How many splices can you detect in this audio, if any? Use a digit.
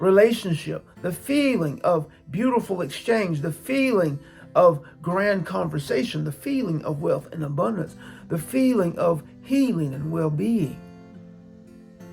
0